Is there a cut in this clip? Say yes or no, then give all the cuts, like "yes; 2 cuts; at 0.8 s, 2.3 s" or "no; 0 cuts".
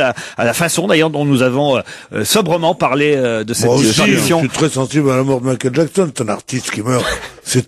yes; 1 cut; at 3.0 s